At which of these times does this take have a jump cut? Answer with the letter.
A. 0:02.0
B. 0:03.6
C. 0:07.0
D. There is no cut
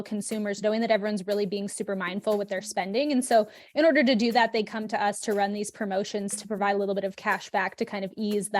D